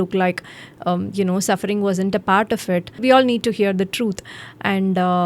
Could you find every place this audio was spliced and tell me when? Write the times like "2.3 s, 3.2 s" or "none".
3.0 s